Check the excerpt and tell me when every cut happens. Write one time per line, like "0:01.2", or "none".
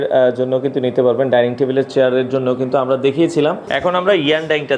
0:03.6